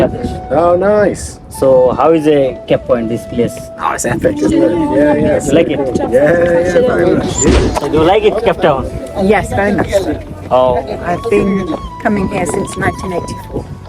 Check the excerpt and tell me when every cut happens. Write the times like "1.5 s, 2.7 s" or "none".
7.5 s